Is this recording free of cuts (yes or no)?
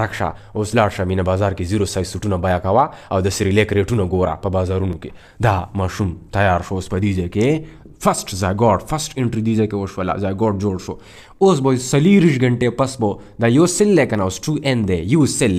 yes